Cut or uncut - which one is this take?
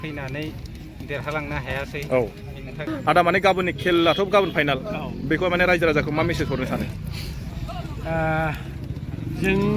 cut